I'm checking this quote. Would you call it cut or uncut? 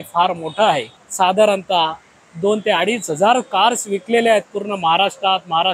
cut